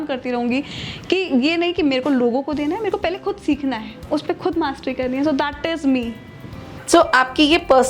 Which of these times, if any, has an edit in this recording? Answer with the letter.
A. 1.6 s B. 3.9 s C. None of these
C